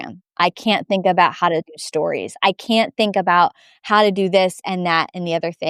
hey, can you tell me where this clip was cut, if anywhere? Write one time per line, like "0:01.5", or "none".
none